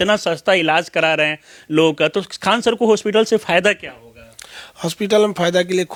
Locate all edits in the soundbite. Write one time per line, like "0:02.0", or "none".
none